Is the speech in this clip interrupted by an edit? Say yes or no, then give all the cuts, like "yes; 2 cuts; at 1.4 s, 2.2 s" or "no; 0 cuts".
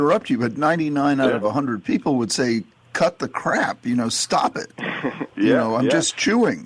no; 0 cuts